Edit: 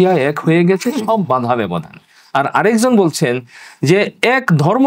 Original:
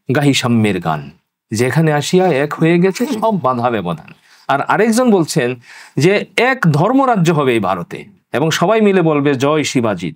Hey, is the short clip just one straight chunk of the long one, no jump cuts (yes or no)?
yes